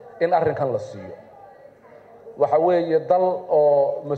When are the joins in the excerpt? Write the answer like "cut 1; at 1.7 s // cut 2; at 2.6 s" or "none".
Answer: none